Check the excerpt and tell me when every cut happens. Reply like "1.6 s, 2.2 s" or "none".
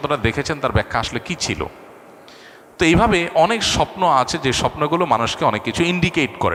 none